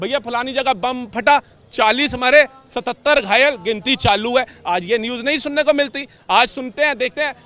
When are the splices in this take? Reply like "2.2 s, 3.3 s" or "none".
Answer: none